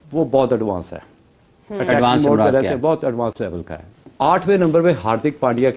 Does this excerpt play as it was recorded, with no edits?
no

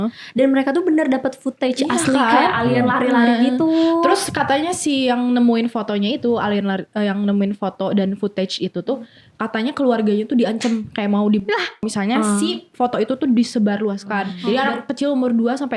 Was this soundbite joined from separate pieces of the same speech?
yes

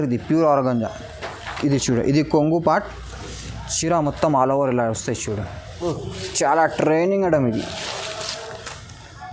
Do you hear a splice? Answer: yes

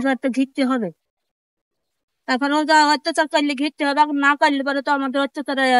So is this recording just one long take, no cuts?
yes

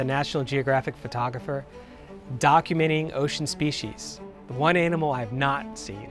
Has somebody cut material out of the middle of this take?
no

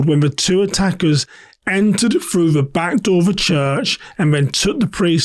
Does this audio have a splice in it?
no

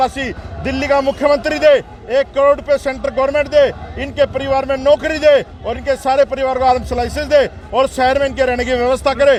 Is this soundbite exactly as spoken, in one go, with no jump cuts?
yes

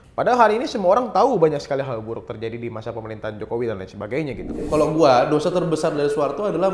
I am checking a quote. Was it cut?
yes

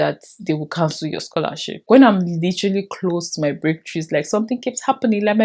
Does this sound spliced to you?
yes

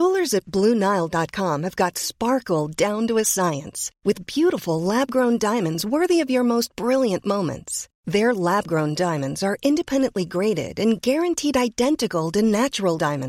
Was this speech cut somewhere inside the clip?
no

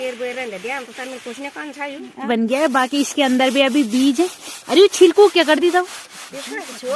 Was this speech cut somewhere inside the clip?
yes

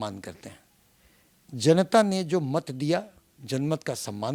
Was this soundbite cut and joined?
no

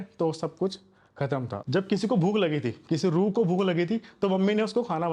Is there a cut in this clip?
yes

